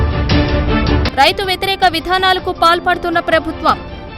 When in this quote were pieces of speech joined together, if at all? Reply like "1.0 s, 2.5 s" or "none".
1.1 s